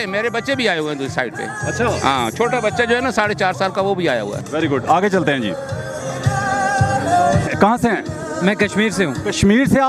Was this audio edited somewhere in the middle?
no; 0 cuts

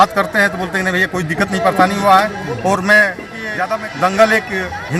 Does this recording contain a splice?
yes; 1 cut; at 3.4 s

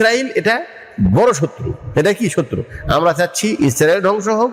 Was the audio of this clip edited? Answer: no; 0 cuts

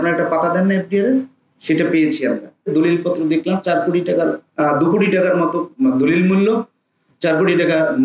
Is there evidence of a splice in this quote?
yes; 1 cut; at 2.7 s

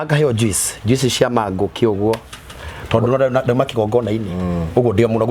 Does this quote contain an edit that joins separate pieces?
no; 0 cuts

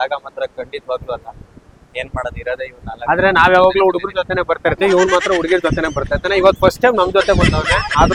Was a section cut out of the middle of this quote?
no; 0 cuts

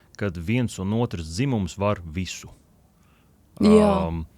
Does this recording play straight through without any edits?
yes; 0 cuts

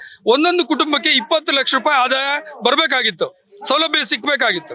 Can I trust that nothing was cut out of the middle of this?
yes; 0 cuts

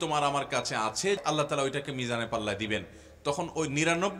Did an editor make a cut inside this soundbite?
yes; 1 cut; at 1.2 s

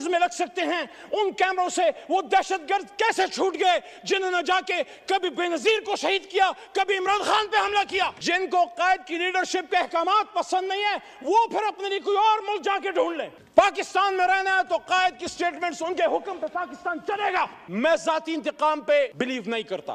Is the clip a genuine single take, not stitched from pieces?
no; 2 cuts; at 8.2 s, 17.6 s

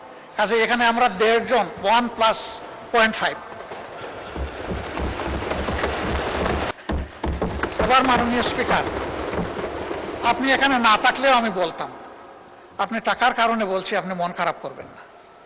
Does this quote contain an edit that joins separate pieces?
yes; 1 cut; at 6.7 s

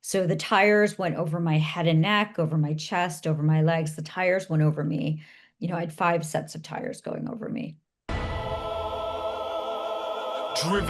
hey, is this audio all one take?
no; 1 cut; at 7.9 s

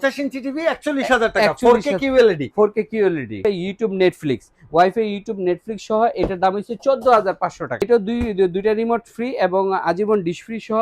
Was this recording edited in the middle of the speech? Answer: yes; 2 cuts; at 3.4 s, 7.8 s

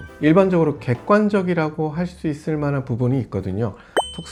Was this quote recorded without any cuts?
yes; 0 cuts

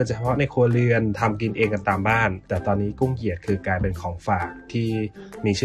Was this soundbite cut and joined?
yes; 1 cut; at 2.5 s

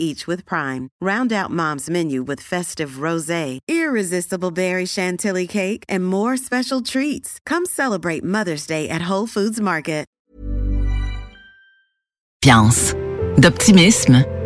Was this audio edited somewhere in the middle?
yes; 2 cuts; at 10.2 s, 12.4 s

